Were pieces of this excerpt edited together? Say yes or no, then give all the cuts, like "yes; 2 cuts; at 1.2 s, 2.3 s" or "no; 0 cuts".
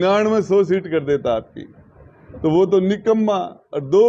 no; 0 cuts